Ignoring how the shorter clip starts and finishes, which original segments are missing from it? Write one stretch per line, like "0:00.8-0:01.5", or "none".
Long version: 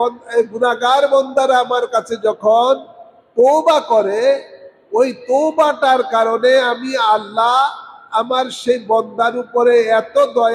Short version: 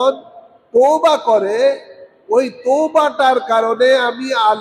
none